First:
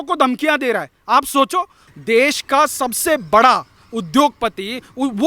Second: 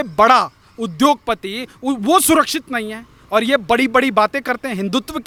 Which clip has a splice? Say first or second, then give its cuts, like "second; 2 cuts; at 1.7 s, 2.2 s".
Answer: first; 1 cut; at 1.9 s